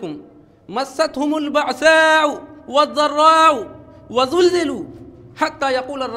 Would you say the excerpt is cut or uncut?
uncut